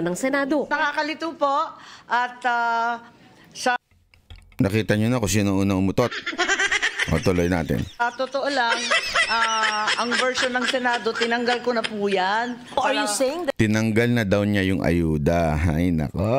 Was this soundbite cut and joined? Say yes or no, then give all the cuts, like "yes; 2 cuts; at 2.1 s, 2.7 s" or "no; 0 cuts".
no; 0 cuts